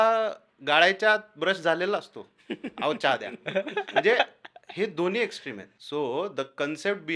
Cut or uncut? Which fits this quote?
cut